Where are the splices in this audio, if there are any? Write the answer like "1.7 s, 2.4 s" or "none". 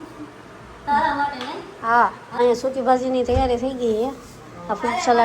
2.2 s